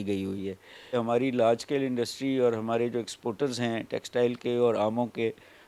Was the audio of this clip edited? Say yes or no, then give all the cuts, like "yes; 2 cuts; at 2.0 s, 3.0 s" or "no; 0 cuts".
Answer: yes; 1 cut; at 0.9 s